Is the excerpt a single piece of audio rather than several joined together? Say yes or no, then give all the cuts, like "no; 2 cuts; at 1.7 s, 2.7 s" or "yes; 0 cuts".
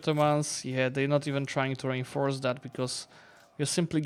yes; 0 cuts